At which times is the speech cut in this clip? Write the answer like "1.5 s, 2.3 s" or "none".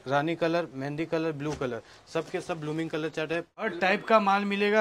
3.6 s